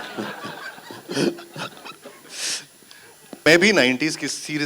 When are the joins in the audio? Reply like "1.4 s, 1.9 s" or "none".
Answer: 3.4 s

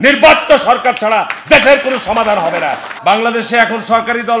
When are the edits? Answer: 2.9 s

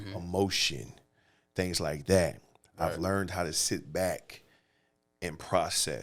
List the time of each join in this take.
none

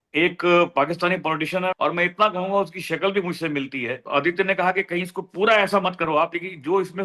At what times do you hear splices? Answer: 1.8 s, 4.0 s

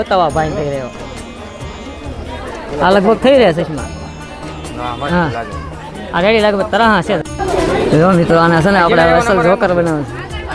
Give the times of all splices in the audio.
none

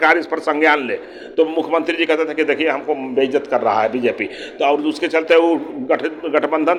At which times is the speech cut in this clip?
none

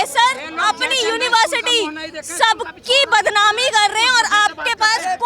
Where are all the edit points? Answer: none

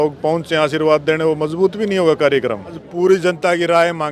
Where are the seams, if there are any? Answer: 2.8 s

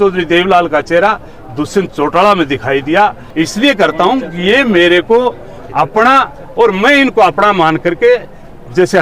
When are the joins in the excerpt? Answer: 3.2 s

